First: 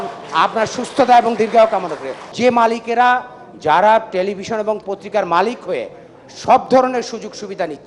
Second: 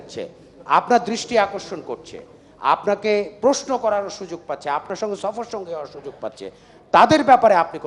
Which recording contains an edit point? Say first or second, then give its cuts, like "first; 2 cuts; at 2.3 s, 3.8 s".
first; 1 cut; at 2.3 s